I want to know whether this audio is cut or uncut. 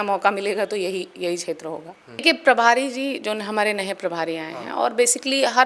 cut